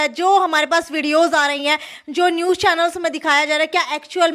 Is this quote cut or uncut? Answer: uncut